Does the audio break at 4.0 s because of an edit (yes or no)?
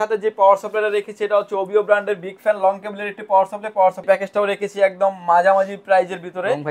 yes